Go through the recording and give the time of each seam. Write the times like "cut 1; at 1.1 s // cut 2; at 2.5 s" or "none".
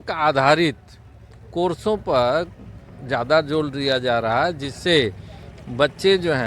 none